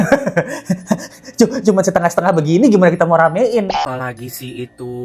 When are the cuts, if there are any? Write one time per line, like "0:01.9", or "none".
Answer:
0:03.8